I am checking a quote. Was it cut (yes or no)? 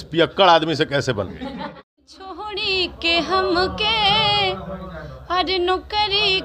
yes